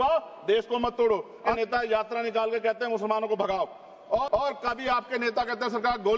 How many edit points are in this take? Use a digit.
2